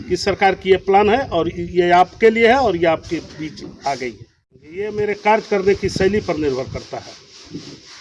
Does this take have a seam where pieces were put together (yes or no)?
yes